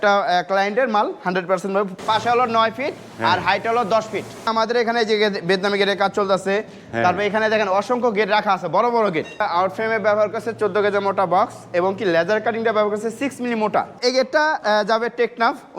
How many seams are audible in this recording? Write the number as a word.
four